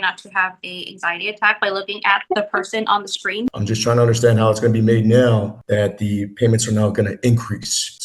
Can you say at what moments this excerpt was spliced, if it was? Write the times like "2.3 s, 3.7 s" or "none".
3.5 s

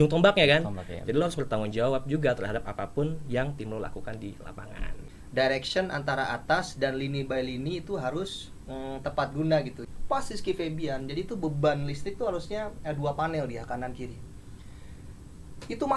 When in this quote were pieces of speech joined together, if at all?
5.0 s, 9.8 s

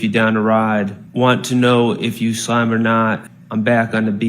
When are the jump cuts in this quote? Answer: 1.0 s, 3.3 s

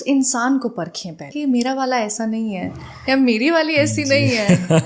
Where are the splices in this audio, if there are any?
1.3 s

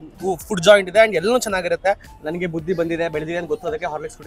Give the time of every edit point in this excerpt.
2.1 s

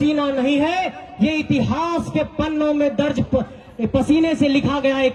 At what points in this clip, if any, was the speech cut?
none

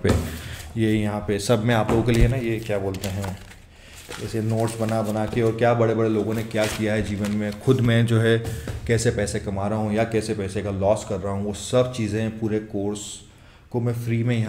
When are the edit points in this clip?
none

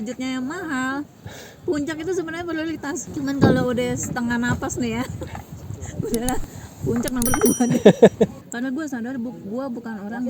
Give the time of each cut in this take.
3.1 s, 8.4 s

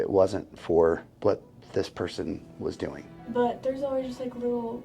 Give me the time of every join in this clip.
1.1 s, 3.1 s

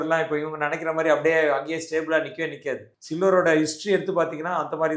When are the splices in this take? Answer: none

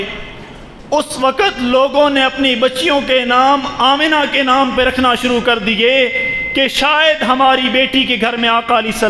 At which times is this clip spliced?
none

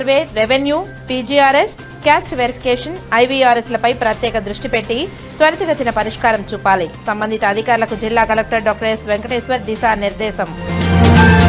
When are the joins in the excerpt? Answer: none

